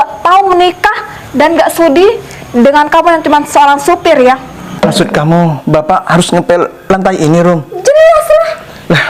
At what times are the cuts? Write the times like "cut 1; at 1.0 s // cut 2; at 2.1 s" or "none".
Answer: cut 1; at 4.6 s